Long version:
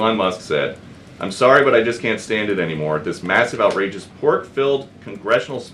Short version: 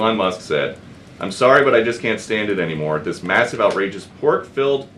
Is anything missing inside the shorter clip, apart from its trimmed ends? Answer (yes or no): no